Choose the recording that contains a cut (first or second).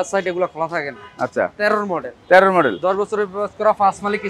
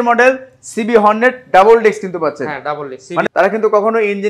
second